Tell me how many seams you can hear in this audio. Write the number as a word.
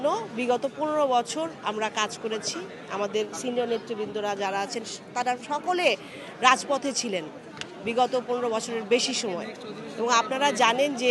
zero